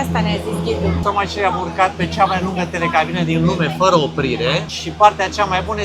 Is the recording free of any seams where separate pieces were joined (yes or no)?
no